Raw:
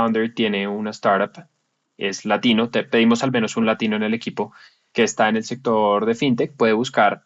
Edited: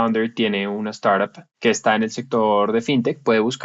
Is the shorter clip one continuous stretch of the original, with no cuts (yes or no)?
no